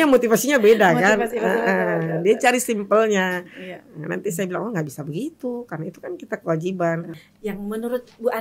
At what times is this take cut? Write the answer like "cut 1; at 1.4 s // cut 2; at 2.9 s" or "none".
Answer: cut 1; at 7.2 s